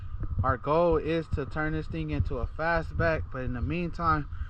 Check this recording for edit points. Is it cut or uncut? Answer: uncut